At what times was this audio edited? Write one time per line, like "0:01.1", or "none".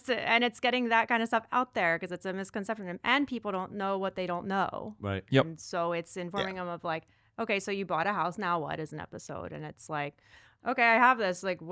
none